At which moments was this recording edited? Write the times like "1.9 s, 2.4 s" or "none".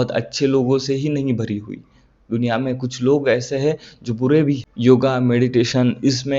4.7 s